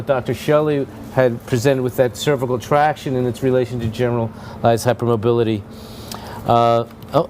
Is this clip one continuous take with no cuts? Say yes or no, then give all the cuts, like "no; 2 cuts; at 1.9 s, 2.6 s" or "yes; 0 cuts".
no; 1 cut; at 4.6 s